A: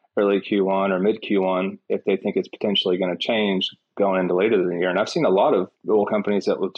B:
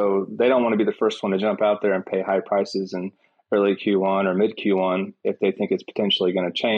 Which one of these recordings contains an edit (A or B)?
A